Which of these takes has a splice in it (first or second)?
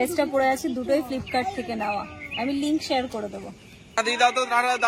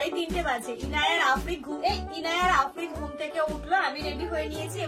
first